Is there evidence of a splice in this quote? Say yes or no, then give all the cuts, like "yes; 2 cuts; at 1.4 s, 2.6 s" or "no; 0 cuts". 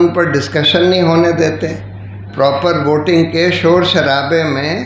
yes; 1 cut; at 2.3 s